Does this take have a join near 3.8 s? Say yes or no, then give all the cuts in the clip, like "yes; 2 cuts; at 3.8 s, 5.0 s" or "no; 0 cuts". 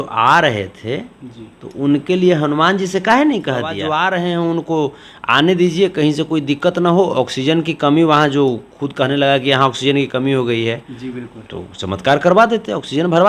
yes; 1 cut; at 3.8 s